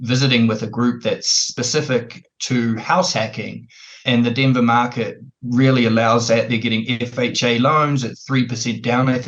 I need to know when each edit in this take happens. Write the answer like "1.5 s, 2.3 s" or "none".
1.4 s, 4.0 s

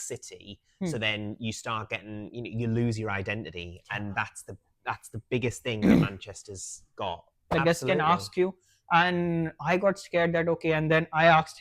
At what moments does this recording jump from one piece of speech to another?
7.5 s

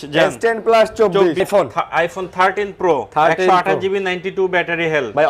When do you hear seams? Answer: 1.4 s

